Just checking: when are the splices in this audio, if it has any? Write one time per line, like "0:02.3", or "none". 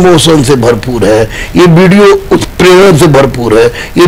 none